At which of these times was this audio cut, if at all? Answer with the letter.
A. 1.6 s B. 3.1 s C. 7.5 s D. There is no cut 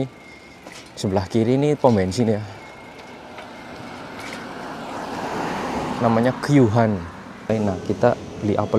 C